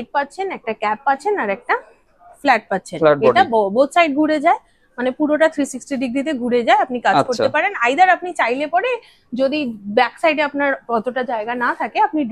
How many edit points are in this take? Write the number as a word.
zero